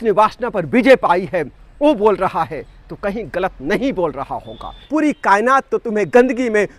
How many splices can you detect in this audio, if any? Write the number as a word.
one